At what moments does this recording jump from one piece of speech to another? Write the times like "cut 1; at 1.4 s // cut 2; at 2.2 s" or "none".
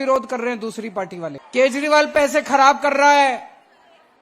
cut 1; at 1.4 s